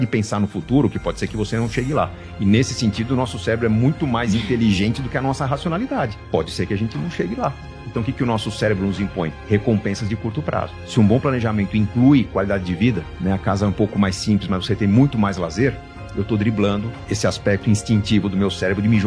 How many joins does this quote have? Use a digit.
0